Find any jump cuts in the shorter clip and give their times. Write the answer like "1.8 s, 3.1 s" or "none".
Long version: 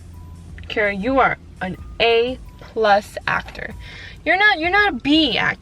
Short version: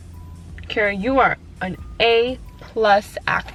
none

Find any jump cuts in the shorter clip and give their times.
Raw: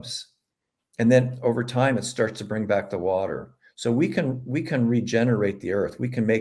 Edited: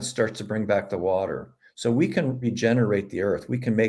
2.4 s

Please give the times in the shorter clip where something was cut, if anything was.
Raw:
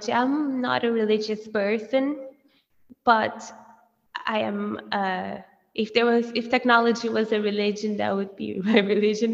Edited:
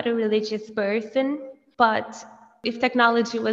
1.6 s, 2.6 s

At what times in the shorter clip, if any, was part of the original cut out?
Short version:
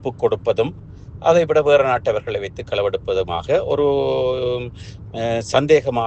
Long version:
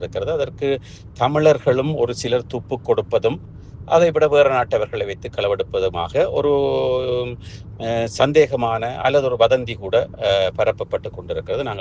none

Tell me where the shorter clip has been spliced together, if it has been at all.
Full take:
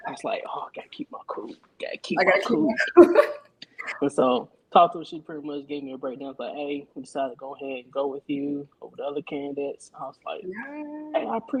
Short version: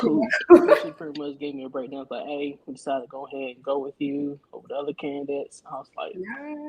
1.0 s

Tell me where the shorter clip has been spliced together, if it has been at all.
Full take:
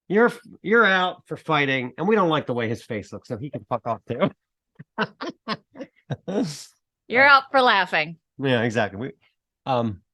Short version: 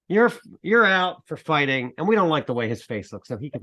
none

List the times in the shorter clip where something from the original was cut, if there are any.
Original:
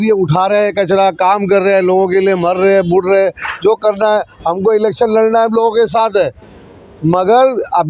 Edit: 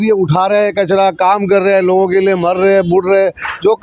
none

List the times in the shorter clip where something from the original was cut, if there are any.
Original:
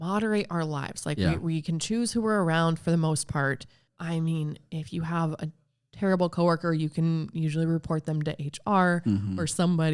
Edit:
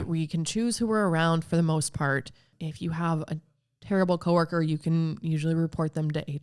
2.5 s

